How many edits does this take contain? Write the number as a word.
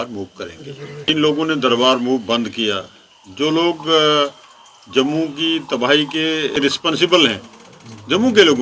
two